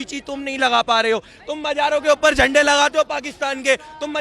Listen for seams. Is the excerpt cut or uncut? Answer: uncut